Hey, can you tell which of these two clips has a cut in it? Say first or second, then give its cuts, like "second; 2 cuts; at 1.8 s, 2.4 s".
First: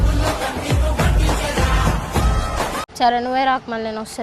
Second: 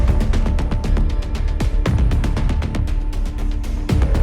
first; 1 cut; at 2.8 s